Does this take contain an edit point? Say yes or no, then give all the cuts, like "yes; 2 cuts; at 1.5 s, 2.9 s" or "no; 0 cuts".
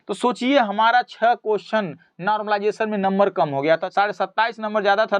yes; 1 cut; at 3.9 s